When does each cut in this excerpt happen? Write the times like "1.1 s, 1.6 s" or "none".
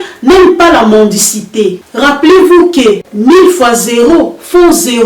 1.8 s